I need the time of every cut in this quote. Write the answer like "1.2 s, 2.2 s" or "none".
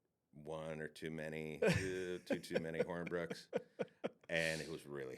4.2 s